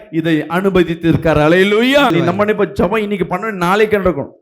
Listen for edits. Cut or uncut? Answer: cut